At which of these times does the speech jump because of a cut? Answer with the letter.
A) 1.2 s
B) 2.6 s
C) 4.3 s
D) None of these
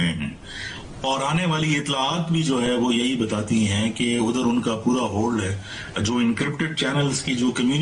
D